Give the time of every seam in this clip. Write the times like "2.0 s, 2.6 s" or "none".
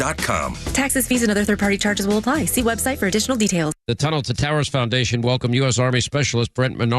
3.8 s